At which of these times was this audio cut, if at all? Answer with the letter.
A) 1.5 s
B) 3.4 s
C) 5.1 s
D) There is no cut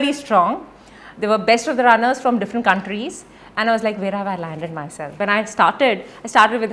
C